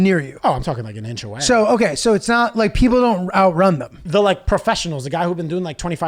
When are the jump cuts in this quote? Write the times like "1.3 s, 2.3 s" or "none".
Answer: 4.0 s